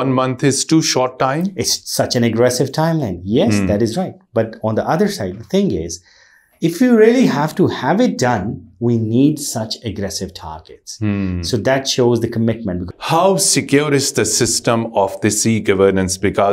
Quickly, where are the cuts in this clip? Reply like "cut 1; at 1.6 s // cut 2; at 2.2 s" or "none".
cut 1; at 12.8 s